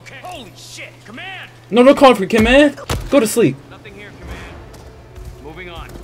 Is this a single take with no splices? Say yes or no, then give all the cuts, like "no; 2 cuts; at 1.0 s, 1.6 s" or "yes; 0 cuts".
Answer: no; 2 cuts; at 1.5 s, 2.9 s